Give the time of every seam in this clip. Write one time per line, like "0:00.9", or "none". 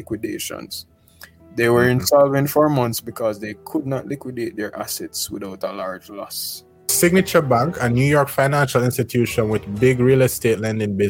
0:06.9